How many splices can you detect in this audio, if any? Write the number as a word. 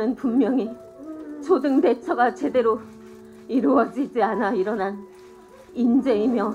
zero